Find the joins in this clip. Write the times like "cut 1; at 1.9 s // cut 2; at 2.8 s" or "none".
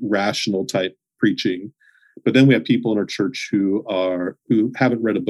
cut 1; at 1.0 s